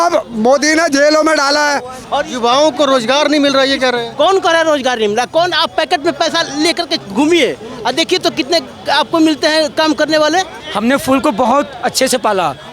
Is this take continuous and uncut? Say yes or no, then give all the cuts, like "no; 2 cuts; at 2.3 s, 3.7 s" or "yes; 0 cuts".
no; 2 cuts; at 2.0 s, 10.6 s